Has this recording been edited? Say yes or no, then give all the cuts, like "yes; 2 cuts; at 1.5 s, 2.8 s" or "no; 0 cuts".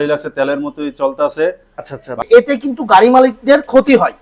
yes; 1 cut; at 2.2 s